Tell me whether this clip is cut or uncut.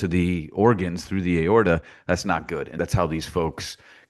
cut